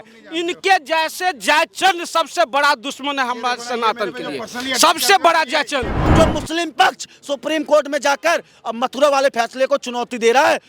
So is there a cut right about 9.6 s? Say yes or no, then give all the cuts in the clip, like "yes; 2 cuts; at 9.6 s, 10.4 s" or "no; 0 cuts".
no; 1 cut; at 6.0 s